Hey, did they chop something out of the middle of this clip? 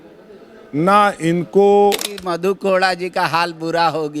yes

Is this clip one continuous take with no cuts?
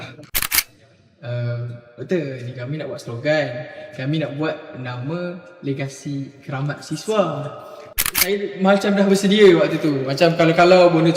no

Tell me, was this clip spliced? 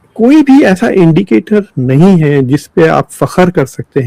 no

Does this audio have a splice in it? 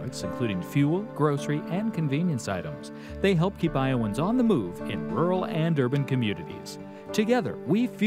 no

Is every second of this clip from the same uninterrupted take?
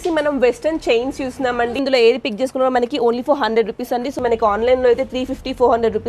no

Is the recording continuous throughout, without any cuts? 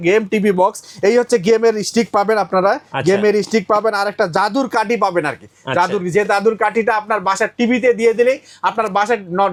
yes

